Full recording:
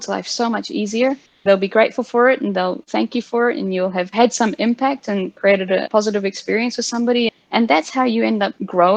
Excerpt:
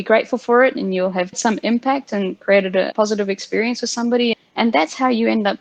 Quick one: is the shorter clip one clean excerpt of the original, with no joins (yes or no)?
no